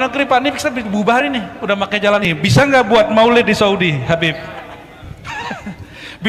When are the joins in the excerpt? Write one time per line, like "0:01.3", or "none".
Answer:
0:02.3